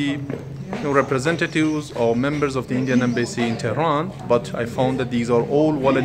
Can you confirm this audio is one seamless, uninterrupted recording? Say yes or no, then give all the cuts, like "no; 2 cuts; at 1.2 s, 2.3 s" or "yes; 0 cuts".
no; 1 cut; at 4.2 s